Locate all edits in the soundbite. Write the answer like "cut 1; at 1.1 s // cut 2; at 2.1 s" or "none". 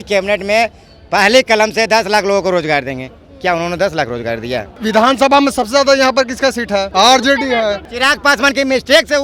cut 1; at 4.8 s // cut 2; at 6.9 s // cut 3; at 7.9 s

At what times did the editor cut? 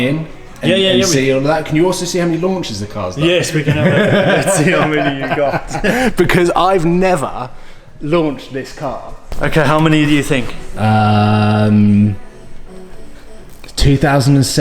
cut 1; at 9.2 s

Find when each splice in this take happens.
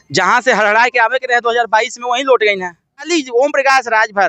cut 1; at 3.1 s

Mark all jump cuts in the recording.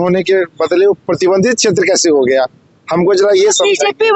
none

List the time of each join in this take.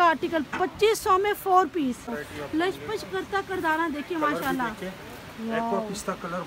cut 1; at 2.2 s

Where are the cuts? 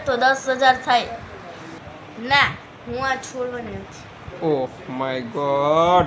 cut 1; at 1.7 s

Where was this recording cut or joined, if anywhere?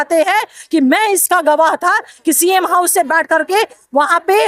none

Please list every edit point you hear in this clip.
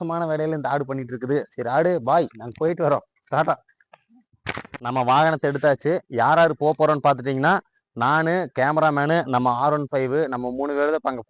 cut 1; at 4.7 s

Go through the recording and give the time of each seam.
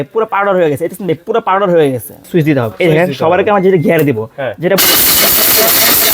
cut 1; at 2.2 s

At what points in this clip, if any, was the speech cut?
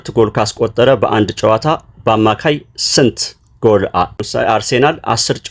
cut 1; at 4.2 s

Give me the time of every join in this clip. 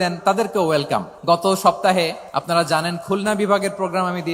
cut 1; at 1.1 s // cut 2; at 2.3 s

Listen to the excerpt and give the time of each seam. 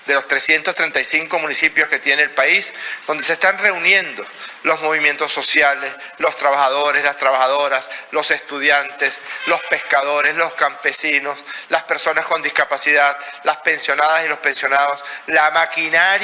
none

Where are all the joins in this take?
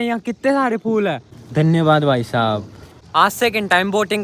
cut 1; at 1.3 s // cut 2; at 3.0 s

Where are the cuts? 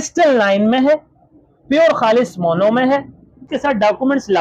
cut 1; at 3.5 s

